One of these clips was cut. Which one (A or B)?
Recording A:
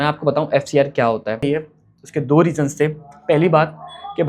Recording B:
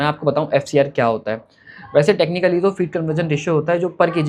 A